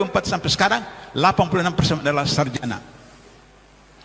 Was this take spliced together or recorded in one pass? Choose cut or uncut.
uncut